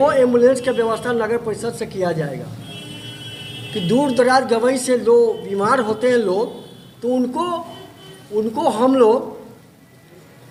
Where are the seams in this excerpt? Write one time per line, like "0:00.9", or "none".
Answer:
none